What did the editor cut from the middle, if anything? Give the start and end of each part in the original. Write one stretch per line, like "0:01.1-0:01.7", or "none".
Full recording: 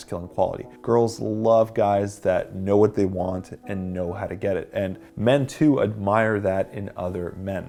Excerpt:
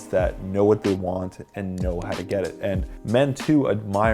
none